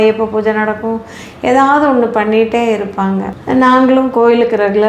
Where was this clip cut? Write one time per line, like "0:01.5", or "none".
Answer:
none